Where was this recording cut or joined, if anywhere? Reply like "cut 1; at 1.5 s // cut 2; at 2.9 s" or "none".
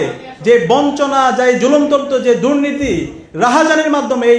none